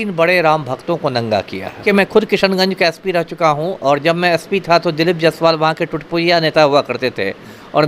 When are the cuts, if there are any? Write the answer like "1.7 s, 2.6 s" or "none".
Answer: 1.8 s